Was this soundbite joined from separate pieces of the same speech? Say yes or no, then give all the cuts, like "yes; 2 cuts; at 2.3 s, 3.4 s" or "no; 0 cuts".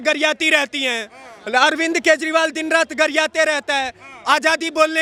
no; 0 cuts